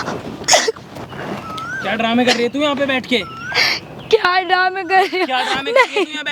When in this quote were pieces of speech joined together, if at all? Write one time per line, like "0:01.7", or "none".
none